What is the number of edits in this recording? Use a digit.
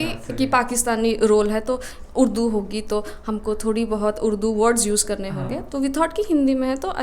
0